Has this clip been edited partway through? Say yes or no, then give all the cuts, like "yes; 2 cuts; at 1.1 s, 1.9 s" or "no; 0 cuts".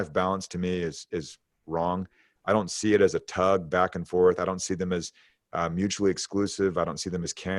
no; 0 cuts